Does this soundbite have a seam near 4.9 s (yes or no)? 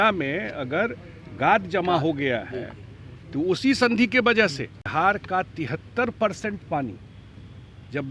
yes